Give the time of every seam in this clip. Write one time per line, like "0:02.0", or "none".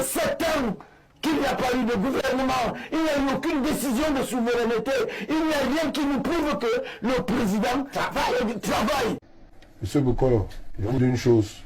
0:09.3
0:10.9